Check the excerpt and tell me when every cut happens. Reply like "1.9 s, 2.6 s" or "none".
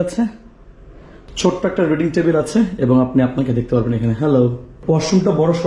1.4 s, 4.7 s